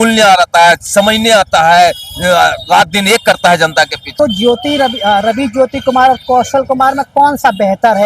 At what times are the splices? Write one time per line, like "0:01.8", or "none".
0:04.0

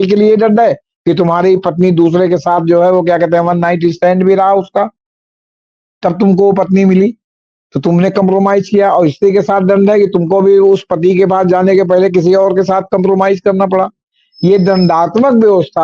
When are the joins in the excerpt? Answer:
none

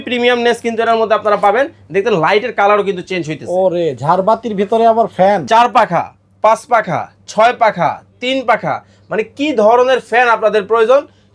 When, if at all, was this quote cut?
0:05.4

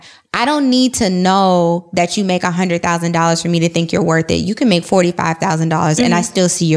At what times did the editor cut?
none

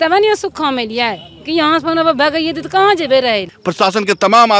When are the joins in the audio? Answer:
0:03.6

